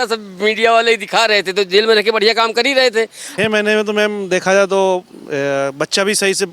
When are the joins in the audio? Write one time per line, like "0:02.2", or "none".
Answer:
0:03.2